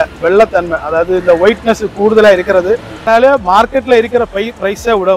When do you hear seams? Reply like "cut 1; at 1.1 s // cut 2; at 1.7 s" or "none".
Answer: cut 1; at 3.1 s